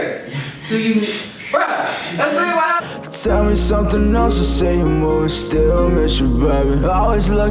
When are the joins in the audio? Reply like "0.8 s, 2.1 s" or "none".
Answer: 2.8 s